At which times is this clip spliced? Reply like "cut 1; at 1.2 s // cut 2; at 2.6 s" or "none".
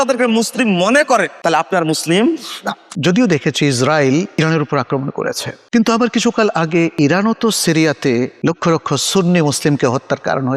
cut 1; at 1.3 s // cut 2; at 2.9 s // cut 3; at 4.3 s // cut 4; at 6.9 s // cut 5; at 8.3 s

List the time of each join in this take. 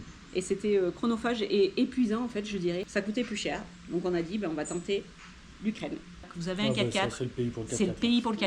cut 1; at 2.9 s // cut 2; at 6.3 s

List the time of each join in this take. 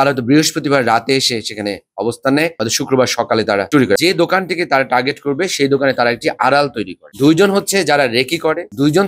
cut 1; at 4.0 s

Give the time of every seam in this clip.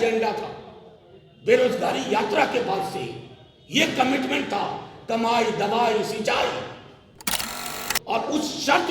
cut 1; at 7.5 s

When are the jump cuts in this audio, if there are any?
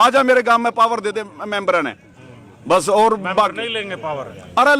none

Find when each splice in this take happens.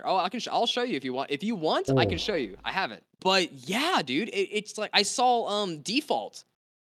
cut 1; at 3.0 s

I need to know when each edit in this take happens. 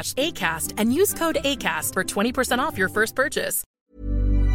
cut 1; at 3.6 s

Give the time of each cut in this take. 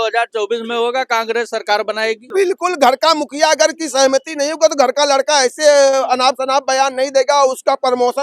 cut 1; at 2.2 s

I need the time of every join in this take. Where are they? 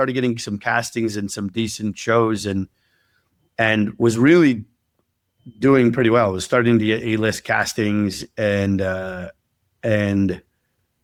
none

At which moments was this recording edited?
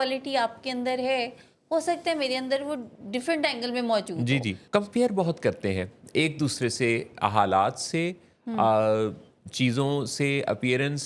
cut 1; at 4.6 s

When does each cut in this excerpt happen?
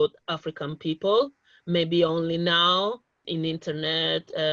cut 1; at 3.2 s

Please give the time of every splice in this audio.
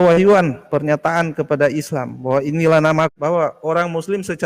cut 1; at 3.1 s

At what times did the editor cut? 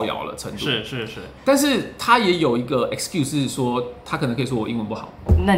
none

